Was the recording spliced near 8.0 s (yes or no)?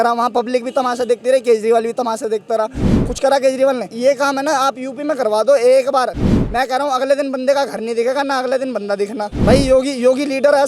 no